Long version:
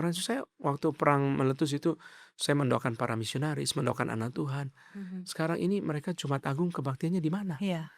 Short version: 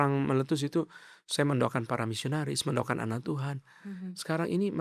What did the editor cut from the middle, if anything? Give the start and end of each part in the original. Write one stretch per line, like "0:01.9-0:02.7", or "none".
none